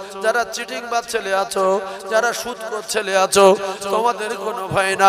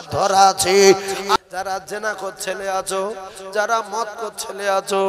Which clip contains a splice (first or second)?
second